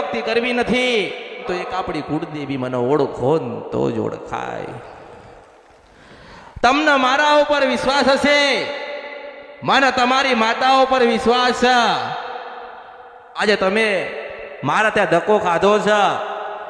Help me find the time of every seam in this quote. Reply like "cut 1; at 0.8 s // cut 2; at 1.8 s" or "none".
cut 1; at 1.4 s